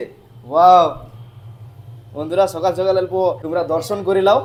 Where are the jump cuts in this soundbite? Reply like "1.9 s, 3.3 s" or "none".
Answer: none